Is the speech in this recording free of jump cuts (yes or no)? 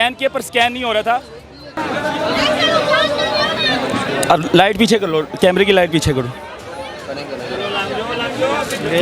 no